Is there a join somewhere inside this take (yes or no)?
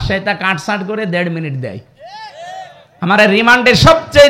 no